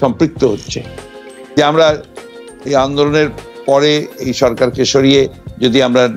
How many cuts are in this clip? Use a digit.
1